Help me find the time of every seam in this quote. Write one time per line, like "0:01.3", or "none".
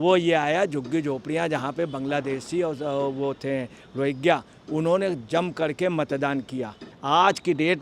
0:06.9